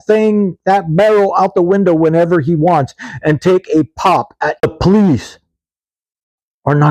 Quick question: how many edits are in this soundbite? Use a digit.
1